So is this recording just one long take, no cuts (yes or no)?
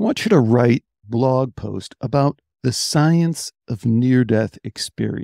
no